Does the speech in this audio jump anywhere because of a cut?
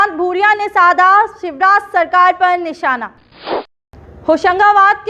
yes; 1 cut; at 3.6 s

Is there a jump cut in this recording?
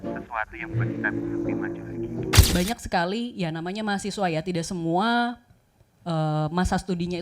yes; 1 cut; at 2.5 s

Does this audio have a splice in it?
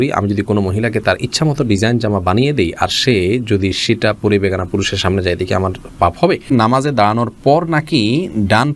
yes; 1 cut; at 6.5 s

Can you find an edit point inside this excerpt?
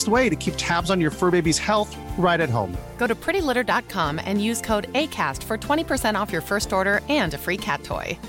no; 0 cuts

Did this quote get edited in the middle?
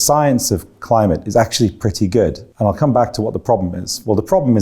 yes; 1 cut; at 2.4 s

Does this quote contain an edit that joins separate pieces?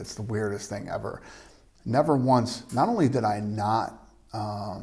no; 0 cuts

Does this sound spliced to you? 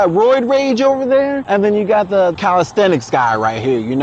yes; 2 cuts; at 1.4 s, 2.4 s

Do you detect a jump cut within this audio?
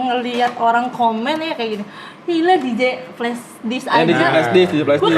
no; 0 cuts

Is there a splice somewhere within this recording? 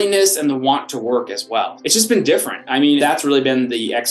yes; 2 cuts; at 1.8 s, 3.0 s

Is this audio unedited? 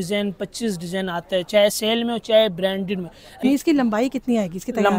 no; 1 cut; at 3.4 s

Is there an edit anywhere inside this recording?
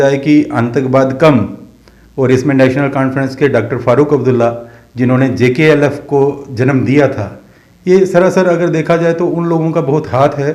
no; 0 cuts

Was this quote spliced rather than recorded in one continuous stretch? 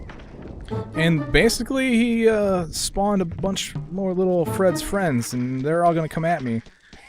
yes; 1 cut; at 1.0 s

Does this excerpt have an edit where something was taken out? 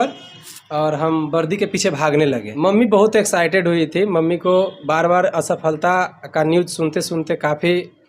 yes; 1 cut; at 2.5 s

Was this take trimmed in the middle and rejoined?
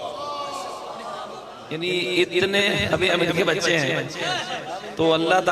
yes; 1 cut; at 1.7 s

